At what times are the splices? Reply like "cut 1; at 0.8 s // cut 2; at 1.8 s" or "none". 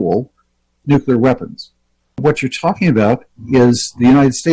cut 1; at 2.2 s